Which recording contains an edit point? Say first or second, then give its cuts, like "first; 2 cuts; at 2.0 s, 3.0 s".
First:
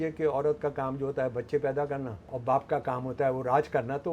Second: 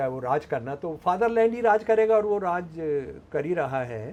first; 1 cut; at 2.2 s